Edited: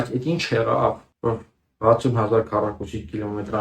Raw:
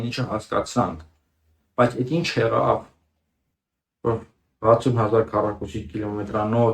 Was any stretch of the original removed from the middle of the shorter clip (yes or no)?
yes